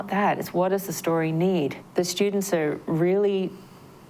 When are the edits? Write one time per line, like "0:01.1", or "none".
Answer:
0:01.8